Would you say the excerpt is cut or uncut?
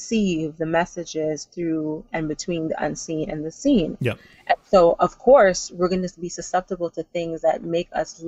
uncut